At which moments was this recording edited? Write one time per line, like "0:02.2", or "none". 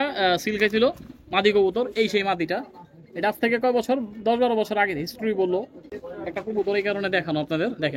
0:05.9